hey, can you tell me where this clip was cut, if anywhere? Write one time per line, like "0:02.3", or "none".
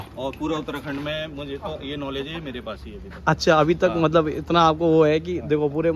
none